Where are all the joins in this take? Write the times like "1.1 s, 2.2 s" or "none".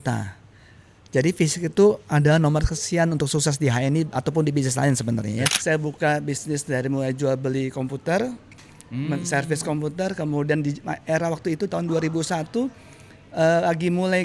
5.5 s

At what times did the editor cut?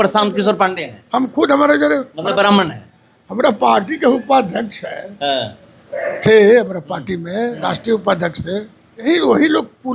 9.0 s

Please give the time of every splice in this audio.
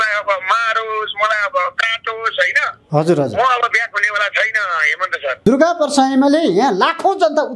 5.4 s

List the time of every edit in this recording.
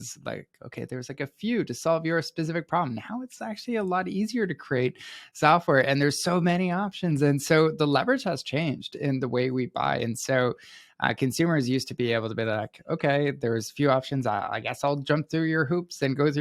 none

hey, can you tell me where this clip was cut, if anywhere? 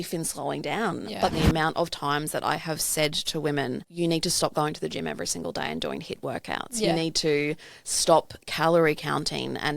1.3 s, 3.9 s

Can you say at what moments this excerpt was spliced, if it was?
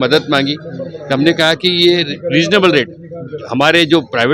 none

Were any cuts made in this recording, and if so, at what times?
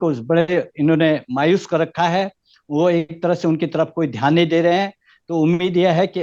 none

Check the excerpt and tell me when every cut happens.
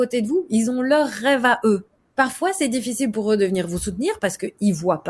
2.0 s

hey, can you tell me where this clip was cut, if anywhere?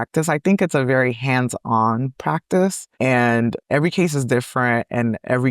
2.9 s

